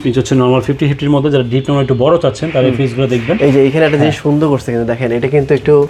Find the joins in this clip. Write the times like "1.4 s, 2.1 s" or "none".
none